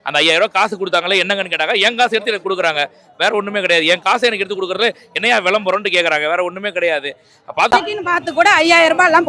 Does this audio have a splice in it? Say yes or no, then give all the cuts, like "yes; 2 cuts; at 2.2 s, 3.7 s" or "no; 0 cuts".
yes; 1 cut; at 7.7 s